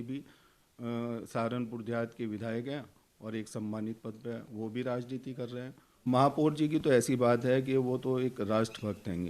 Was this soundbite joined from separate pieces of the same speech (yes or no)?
yes